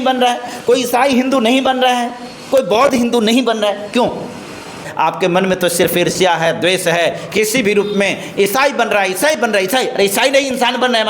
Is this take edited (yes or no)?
yes